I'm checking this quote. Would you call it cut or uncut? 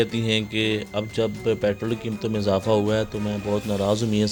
uncut